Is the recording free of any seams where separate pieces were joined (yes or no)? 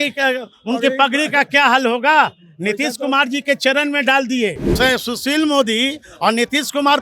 no